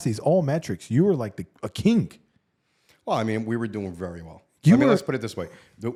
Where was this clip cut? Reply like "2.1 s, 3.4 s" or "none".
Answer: none